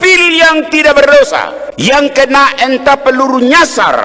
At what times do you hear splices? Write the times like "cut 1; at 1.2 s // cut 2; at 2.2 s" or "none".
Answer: cut 1; at 1.6 s